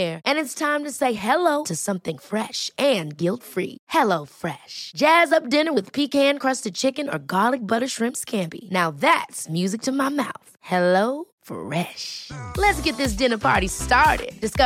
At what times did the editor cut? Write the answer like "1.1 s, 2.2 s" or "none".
none